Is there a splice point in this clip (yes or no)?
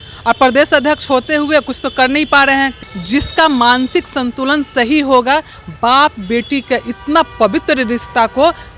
yes